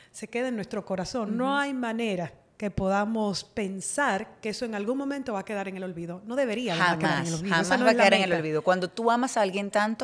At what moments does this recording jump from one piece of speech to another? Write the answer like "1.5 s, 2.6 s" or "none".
none